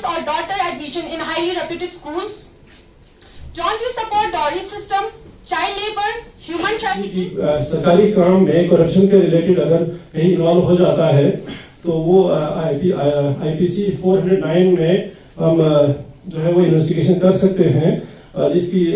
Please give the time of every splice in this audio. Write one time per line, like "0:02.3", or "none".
0:07.1